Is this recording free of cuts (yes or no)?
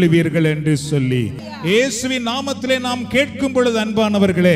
no